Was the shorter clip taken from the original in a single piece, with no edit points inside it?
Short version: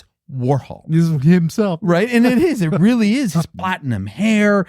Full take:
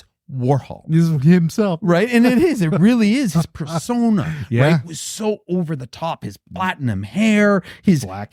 no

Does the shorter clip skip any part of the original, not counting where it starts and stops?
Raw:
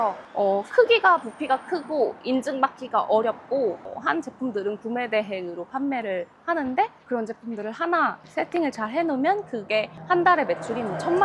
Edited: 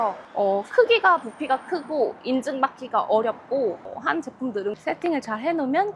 yes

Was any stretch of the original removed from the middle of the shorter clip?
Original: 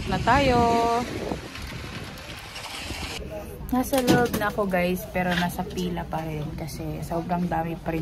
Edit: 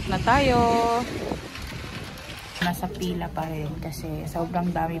yes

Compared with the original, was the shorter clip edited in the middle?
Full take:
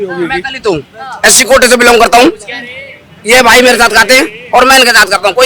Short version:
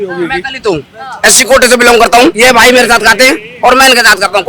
yes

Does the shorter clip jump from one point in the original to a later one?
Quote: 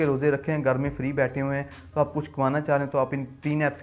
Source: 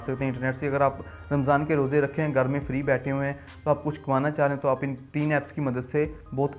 no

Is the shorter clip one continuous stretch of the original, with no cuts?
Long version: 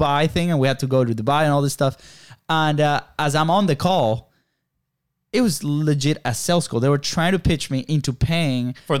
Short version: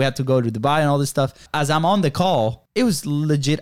no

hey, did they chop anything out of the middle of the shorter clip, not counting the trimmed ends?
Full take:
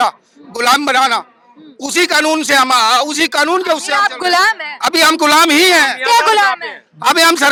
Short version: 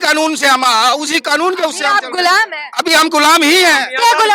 no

